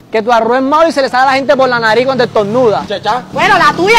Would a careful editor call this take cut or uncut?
uncut